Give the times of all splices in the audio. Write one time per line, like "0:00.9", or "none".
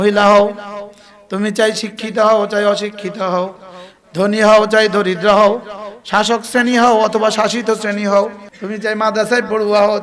0:08.5